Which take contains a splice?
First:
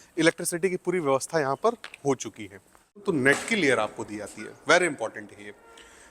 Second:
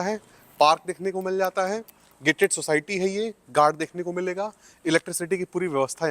first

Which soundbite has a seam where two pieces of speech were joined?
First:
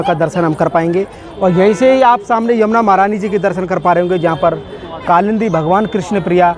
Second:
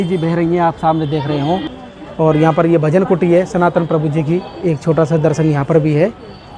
second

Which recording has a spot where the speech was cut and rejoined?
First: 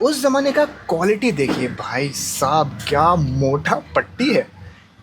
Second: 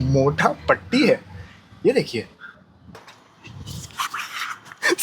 second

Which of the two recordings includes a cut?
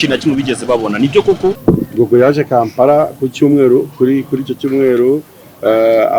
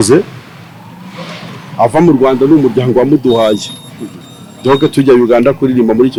first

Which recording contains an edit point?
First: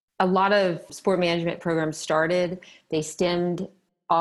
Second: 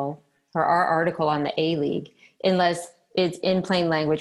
first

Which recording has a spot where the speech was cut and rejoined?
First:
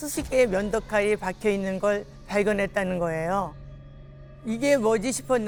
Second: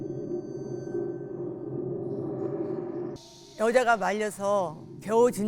second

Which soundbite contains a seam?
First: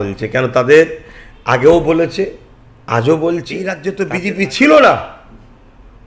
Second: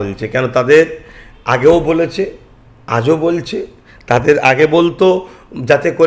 first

